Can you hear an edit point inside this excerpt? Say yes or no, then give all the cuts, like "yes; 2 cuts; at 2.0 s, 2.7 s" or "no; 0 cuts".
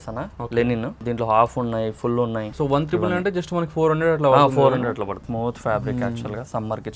yes; 3 cuts; at 1.0 s, 2.5 s, 5.2 s